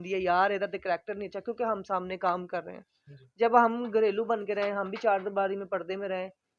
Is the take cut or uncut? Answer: uncut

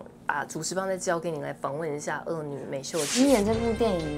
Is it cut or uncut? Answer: cut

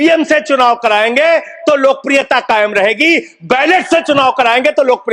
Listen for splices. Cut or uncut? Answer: uncut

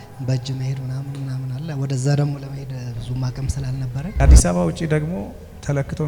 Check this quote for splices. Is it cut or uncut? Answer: cut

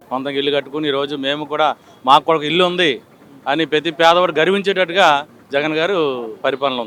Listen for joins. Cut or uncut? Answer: uncut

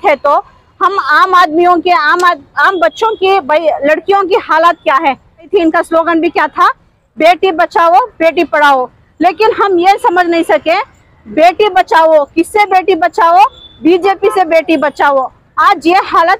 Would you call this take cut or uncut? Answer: cut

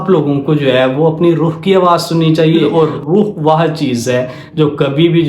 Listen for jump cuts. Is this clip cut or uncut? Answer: cut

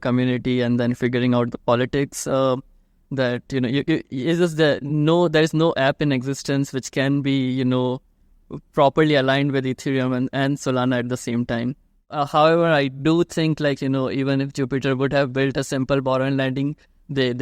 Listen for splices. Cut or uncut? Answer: cut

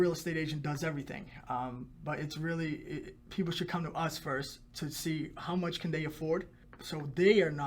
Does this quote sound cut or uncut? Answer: uncut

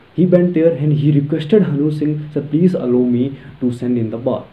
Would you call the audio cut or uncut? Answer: uncut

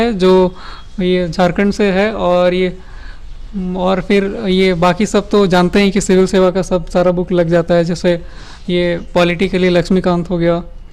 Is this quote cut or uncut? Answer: uncut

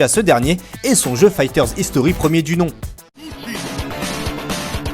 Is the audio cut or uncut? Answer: cut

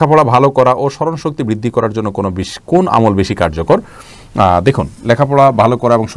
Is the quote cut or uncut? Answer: uncut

